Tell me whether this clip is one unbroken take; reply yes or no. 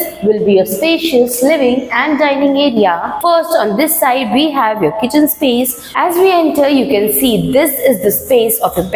no